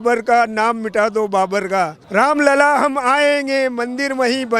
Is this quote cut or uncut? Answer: cut